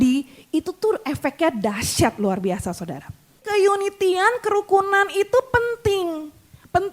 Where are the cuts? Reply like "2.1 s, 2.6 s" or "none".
3.4 s